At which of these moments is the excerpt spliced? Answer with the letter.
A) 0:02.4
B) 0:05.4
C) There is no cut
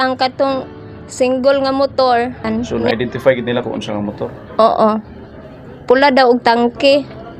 A